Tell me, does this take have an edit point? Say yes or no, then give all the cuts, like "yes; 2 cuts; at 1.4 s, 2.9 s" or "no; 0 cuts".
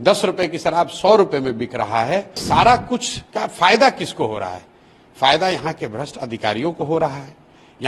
yes; 1 cut; at 2.4 s